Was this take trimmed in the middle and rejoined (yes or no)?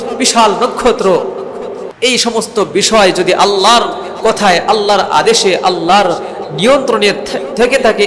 yes